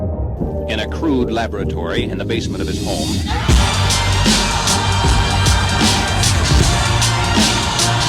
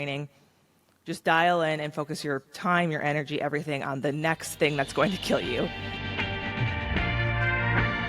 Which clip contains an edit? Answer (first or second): second